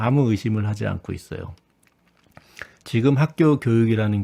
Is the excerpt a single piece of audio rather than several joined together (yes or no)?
yes